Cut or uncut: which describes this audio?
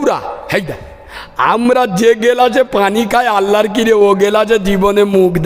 uncut